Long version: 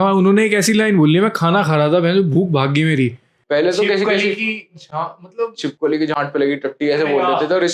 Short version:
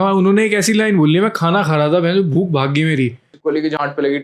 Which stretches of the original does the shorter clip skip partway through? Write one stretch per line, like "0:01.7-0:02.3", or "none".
0:03.3-0:05.6

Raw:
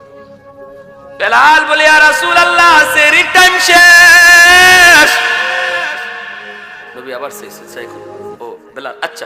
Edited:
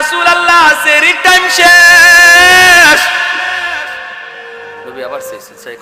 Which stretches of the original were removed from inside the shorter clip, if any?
none

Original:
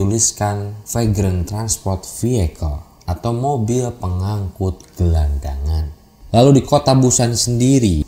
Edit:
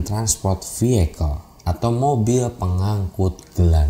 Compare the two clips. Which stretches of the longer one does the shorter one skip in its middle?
none

